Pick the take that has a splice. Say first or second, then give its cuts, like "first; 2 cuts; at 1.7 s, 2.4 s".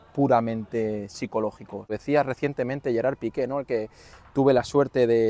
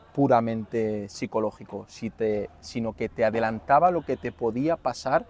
first; 1 cut; at 2.0 s